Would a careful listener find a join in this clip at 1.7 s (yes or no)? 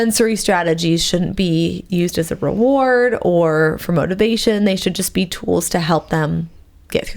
no